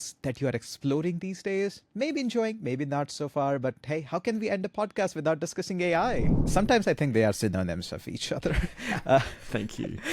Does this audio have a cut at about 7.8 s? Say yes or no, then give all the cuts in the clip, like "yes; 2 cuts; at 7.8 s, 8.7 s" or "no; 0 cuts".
no; 1 cut; at 6.4 s